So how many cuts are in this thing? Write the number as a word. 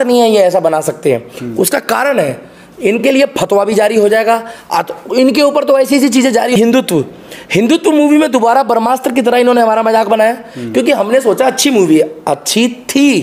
one